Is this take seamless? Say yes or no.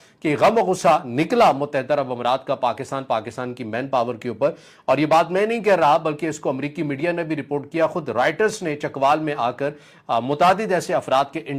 yes